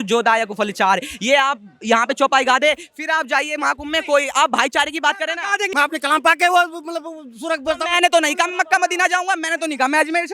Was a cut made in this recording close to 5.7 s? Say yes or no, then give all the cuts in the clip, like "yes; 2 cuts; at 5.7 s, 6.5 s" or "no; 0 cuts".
yes; 1 cut; at 5.7 s